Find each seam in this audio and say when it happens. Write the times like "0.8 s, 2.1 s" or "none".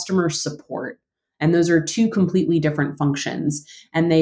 none